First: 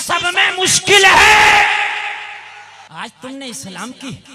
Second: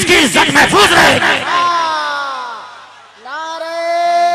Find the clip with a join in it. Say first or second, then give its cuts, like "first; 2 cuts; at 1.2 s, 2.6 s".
first; 1 cut; at 2.7 s